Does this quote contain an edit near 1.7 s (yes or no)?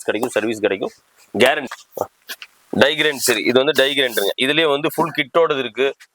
yes